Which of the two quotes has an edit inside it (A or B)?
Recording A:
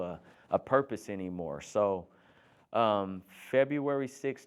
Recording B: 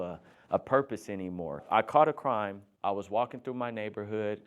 B